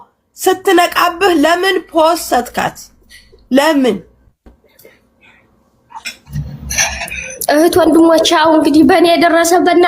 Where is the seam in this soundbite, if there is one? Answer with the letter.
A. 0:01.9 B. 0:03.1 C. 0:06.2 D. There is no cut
C